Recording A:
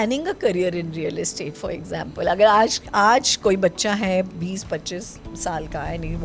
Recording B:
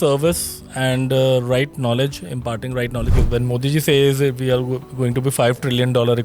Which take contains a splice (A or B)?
B